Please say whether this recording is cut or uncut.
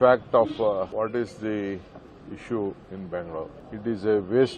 cut